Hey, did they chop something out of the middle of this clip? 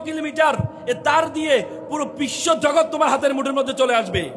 no; 0 cuts

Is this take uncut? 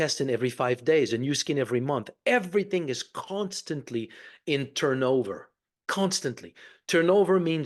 yes; 0 cuts

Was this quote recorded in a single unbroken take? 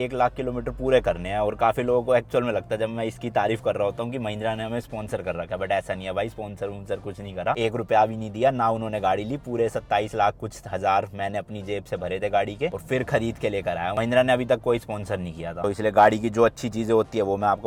yes; 0 cuts

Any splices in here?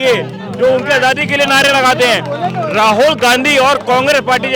no; 0 cuts

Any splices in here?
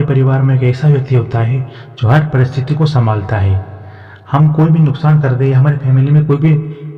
no; 0 cuts

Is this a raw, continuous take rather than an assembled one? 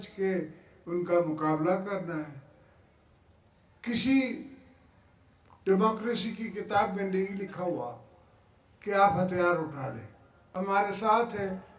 no; 1 cut; at 10.4 s

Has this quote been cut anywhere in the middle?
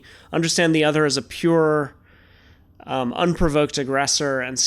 no; 0 cuts

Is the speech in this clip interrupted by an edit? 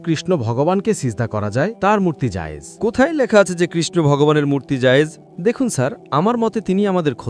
yes; 1 cut; at 5.3 s

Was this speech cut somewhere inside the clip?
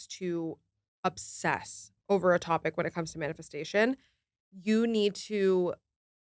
no; 0 cuts

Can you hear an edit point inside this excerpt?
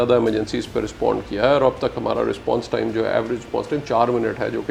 no; 0 cuts

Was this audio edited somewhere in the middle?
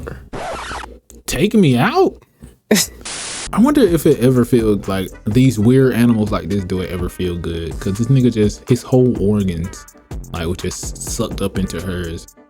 yes; 1 cut; at 3.5 s

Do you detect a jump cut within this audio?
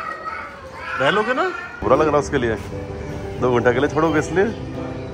yes; 1 cut; at 1.8 s

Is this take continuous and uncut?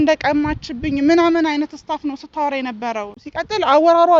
yes; 0 cuts

